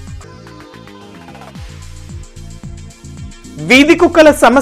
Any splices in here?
no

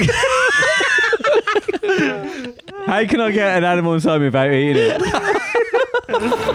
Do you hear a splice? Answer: no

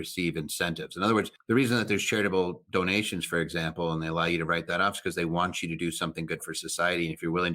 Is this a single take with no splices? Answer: no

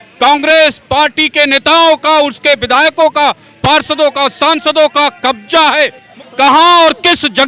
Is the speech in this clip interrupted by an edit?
yes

